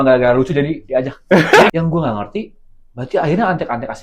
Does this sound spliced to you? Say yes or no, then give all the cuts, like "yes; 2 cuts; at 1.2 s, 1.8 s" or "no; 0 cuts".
yes; 1 cut; at 1.7 s